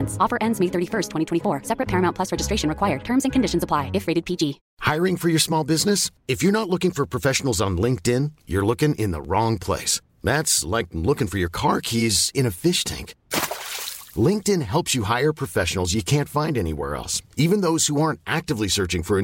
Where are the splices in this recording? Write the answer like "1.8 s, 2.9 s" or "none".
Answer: 4.7 s